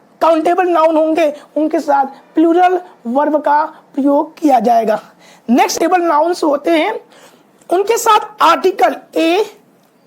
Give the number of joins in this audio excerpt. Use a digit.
1